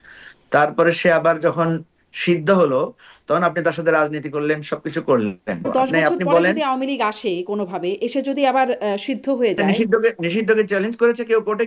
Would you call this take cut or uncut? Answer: cut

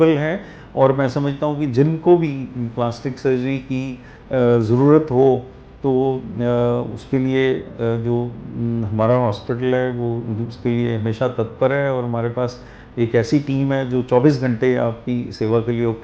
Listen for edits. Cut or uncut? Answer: uncut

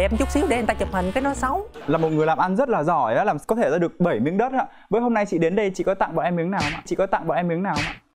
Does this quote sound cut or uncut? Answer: cut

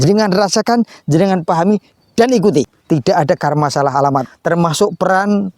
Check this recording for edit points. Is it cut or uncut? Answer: cut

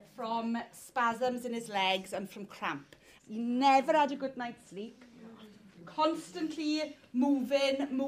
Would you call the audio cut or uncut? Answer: cut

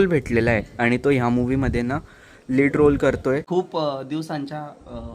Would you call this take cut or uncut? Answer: cut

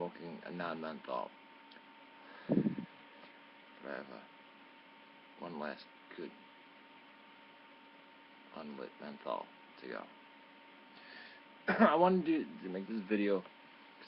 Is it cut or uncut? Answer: cut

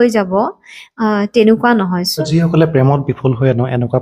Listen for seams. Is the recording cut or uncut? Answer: cut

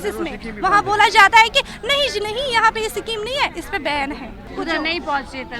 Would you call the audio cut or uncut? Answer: cut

